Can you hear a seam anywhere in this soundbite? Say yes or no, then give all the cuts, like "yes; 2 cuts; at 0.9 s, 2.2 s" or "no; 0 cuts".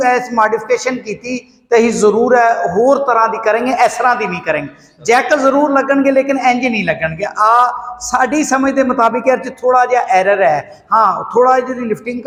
no; 0 cuts